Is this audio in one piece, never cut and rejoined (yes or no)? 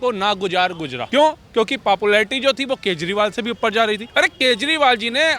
no